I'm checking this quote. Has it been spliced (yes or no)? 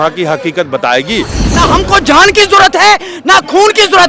yes